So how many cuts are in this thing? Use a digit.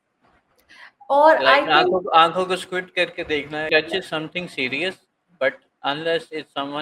1